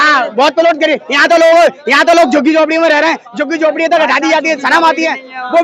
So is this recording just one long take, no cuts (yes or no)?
yes